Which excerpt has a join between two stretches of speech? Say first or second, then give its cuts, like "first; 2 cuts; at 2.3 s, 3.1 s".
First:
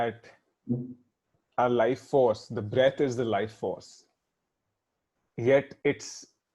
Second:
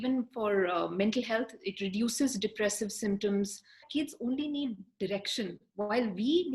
second; 1 cut; at 3.8 s